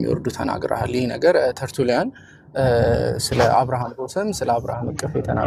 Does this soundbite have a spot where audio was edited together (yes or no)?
no